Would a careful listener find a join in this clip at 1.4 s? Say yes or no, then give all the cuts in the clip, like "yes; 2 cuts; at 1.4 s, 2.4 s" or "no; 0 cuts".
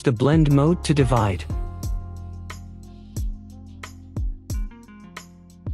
yes; 2 cuts; at 1.4 s, 3.5 s